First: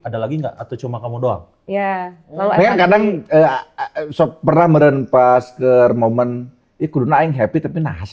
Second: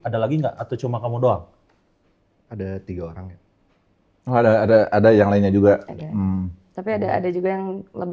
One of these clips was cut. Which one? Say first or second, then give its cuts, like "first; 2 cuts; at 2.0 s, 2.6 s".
first; 1 cut; at 1.5 s